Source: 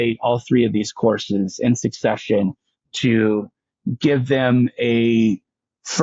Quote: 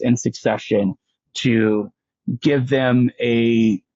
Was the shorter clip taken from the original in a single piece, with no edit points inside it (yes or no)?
yes